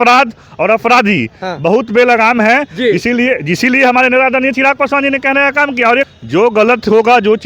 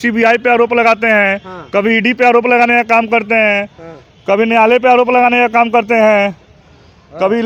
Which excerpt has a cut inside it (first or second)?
first